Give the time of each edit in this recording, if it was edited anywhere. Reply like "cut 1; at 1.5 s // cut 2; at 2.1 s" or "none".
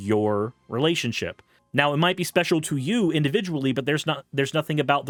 none